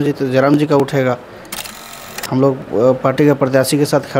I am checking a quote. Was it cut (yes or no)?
yes